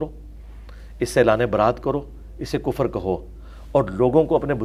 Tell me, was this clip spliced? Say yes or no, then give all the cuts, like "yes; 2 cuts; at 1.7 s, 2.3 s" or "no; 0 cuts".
no; 0 cuts